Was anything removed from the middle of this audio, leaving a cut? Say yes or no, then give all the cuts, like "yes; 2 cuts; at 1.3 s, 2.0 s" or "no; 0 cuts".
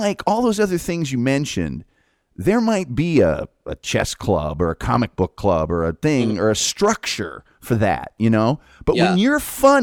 no; 0 cuts